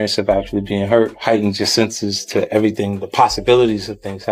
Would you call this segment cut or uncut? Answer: uncut